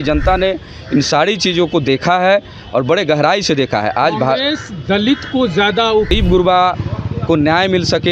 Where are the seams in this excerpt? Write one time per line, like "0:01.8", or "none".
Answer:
0:06.1